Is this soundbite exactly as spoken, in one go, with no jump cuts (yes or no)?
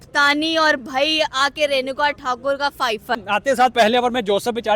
no